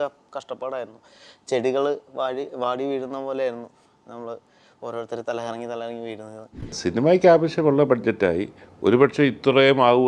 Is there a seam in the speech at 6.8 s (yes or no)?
yes